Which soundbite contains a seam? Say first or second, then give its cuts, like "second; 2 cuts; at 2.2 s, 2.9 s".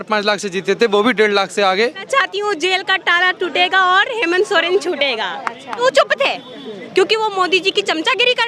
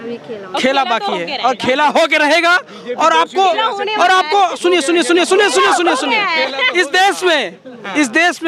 first; 2 cuts; at 2.0 s, 5.8 s